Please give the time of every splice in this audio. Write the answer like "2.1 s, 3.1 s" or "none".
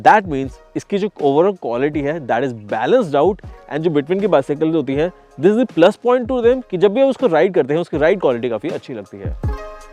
none

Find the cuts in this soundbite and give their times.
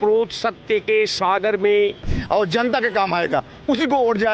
2.2 s

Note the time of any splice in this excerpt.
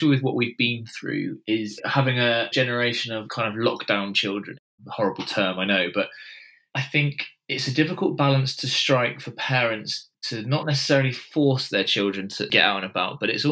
2.7 s, 4.6 s, 12.4 s

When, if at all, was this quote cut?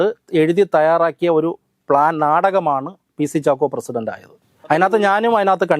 4.7 s

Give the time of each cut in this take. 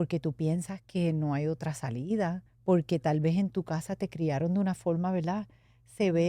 2.5 s

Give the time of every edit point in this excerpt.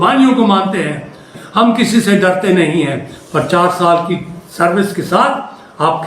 1.3 s

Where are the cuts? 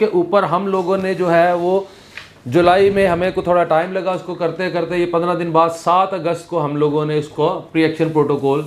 none

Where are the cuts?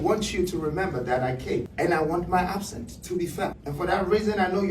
1.7 s, 3.6 s

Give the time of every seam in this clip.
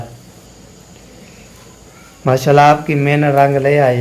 none

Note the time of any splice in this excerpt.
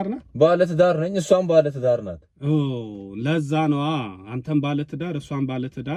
none

